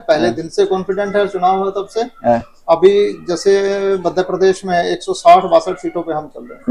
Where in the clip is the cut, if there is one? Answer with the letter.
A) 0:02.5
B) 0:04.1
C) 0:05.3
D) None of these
D